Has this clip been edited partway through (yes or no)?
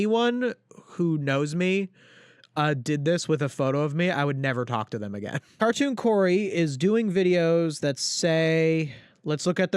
yes